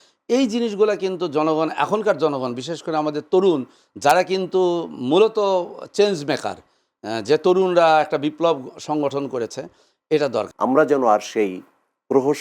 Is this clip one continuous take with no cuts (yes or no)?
no